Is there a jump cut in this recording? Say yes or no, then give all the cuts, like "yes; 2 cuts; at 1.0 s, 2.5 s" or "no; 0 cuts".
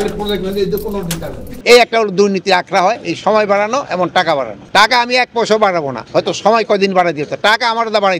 yes; 2 cuts; at 1.4 s, 4.6 s